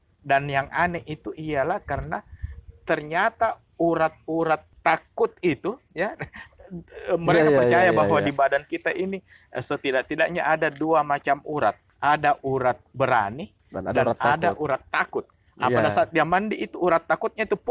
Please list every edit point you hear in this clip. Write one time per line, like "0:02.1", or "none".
0:04.7
0:11.9